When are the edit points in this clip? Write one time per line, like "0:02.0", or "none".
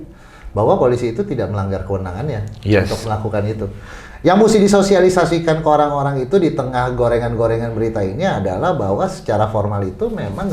none